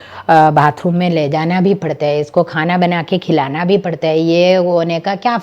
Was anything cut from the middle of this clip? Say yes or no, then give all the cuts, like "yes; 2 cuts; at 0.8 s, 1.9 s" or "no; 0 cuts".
no; 0 cuts